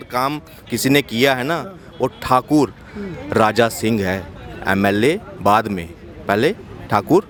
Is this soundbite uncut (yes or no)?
yes